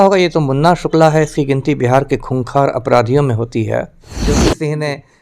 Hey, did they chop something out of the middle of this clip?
yes; 1 cut; at 4.2 s

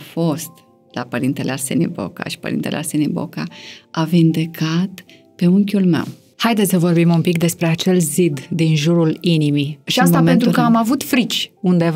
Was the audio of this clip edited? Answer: yes; 2 cuts; at 6.2 s, 9.8 s

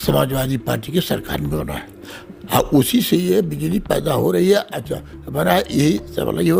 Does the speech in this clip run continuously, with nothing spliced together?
yes; 0 cuts

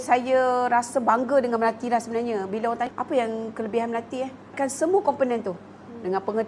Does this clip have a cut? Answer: yes; 2 cuts; at 2.9 s, 4.5 s

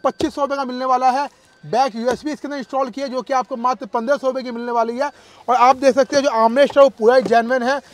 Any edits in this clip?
no; 0 cuts

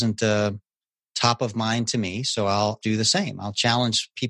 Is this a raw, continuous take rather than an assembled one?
no; 1 cut; at 2.8 s

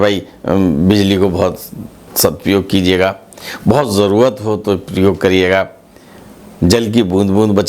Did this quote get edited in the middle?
yes; 1 cut; at 2.1 s

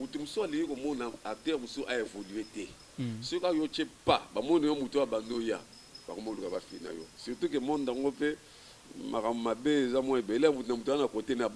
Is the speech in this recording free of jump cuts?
yes; 0 cuts

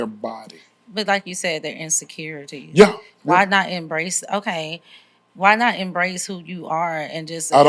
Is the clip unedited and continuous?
yes; 0 cuts

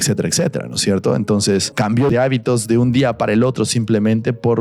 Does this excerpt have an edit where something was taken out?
yes; 1 cut; at 2.1 s

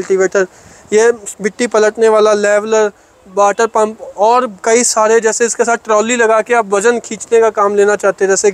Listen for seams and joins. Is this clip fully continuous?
yes; 0 cuts

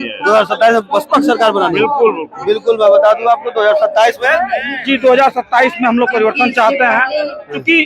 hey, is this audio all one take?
yes; 0 cuts

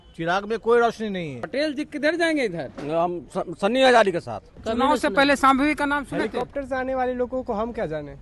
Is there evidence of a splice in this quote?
yes; 2 cuts; at 1.3 s, 4.5 s

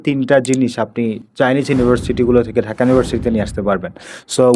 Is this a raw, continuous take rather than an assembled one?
yes; 0 cuts

